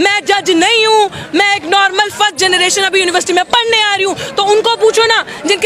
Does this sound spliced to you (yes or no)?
no